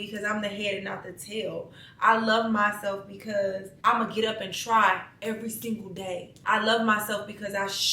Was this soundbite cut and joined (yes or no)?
yes